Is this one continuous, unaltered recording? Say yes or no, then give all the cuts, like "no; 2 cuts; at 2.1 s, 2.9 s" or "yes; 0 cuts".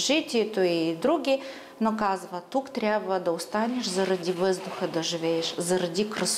yes; 0 cuts